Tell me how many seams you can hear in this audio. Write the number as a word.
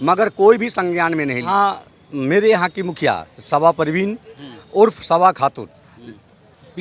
one